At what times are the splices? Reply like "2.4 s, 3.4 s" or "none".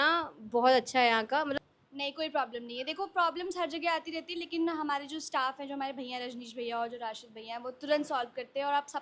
1.6 s